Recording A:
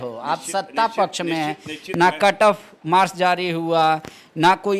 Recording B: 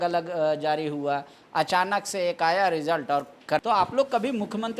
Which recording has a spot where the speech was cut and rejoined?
B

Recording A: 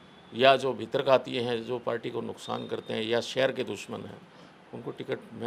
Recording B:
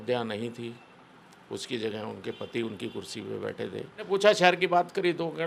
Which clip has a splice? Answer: B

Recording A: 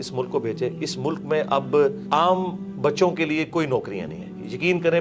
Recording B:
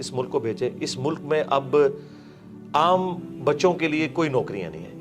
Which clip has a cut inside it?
A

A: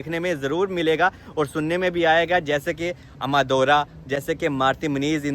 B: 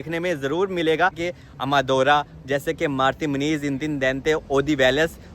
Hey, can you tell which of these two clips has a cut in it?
B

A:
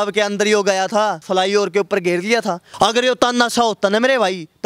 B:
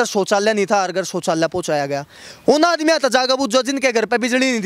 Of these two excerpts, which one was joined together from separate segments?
A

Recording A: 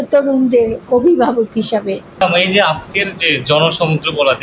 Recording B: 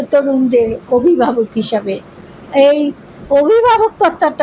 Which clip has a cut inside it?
A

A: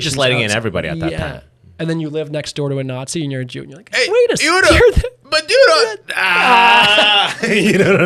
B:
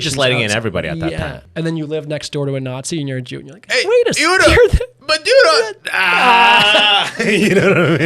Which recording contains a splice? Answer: B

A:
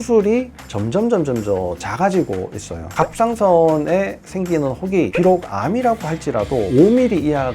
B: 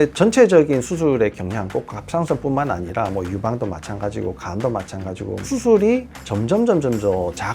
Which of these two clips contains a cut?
A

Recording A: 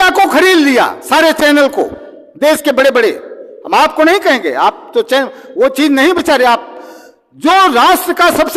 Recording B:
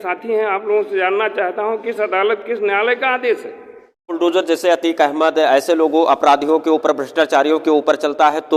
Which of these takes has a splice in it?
B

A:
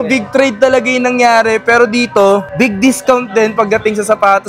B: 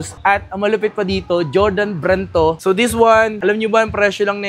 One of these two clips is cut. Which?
B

